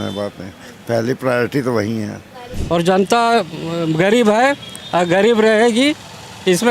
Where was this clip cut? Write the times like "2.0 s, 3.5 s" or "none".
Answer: 2.5 s